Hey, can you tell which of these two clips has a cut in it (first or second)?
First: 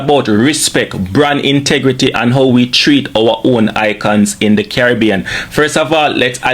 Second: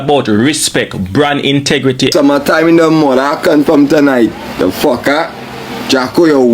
second